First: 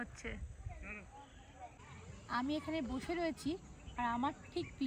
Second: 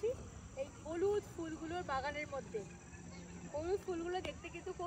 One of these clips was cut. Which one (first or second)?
first